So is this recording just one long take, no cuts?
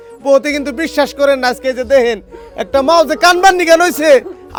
yes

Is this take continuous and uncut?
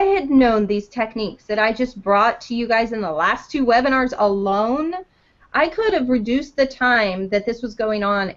yes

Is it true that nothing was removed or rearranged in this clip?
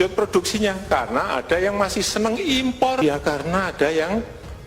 no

